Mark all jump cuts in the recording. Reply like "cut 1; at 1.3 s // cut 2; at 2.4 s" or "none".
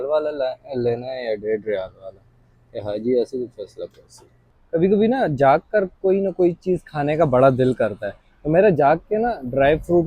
cut 1; at 2.7 s // cut 2; at 4.5 s